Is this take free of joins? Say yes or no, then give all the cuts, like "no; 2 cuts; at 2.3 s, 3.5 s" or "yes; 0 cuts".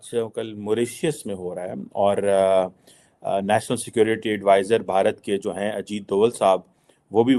yes; 0 cuts